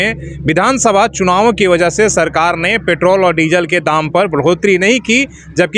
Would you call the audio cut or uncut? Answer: uncut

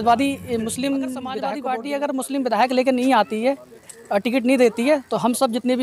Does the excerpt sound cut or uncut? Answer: cut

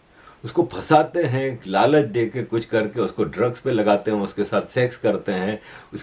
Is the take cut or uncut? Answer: uncut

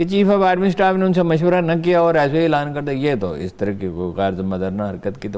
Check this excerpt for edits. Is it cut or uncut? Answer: uncut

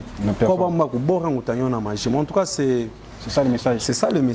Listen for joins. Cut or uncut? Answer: uncut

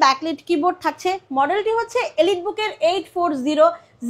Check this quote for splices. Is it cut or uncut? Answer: uncut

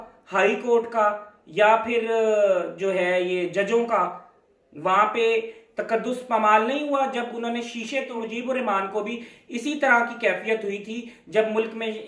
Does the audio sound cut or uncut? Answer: cut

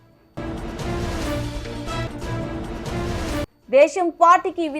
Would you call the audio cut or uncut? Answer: uncut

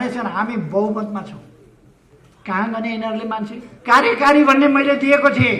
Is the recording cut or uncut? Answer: cut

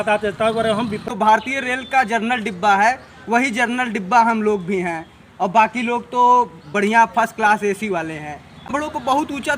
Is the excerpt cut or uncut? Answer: cut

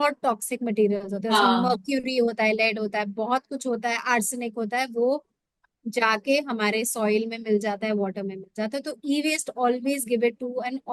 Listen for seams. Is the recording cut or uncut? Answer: uncut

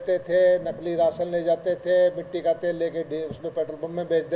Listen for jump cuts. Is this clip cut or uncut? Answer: uncut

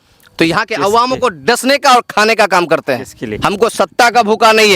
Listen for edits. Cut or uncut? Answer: cut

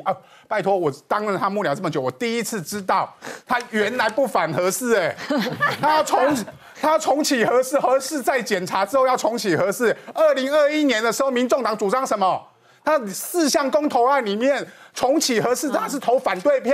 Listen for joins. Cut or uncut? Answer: uncut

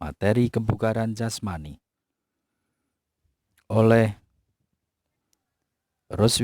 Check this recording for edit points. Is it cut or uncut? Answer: uncut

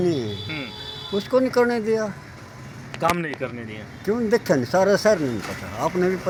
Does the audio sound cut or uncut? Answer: uncut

